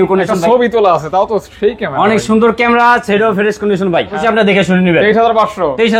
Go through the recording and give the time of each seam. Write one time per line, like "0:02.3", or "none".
0:04.2